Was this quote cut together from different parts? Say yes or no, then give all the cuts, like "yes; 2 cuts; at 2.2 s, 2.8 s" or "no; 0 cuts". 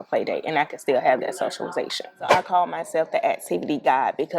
yes; 1 cut; at 2.3 s